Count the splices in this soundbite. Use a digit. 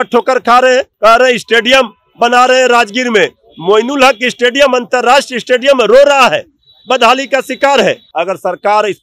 2